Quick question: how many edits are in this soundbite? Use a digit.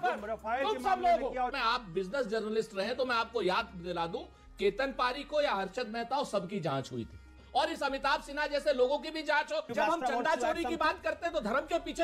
3